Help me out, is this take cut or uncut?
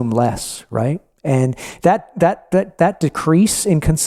uncut